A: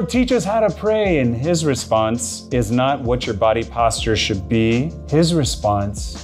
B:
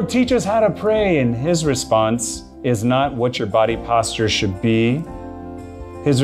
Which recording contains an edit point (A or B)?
A